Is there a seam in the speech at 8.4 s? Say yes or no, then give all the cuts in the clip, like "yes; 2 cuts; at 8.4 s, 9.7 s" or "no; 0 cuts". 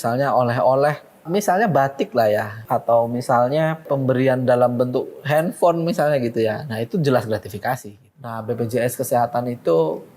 yes; 4 cuts; at 1.2 s, 2.6 s, 3.9 s, 8.4 s